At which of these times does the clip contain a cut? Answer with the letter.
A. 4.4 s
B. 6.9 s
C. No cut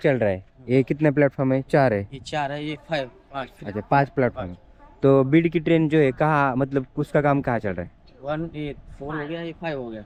C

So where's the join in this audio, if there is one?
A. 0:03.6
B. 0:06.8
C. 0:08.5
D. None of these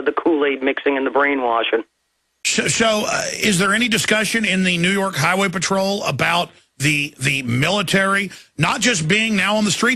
B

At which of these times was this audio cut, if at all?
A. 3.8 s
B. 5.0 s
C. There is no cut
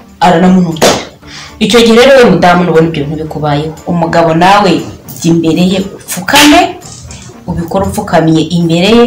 A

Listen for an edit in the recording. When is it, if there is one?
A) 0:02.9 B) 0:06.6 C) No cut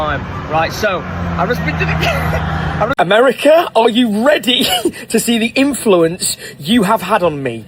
A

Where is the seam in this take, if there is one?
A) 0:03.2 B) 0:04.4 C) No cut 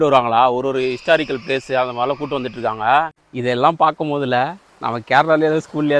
A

